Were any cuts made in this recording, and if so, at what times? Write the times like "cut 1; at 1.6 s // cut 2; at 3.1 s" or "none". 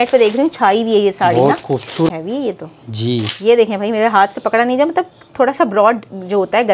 cut 1; at 2.1 s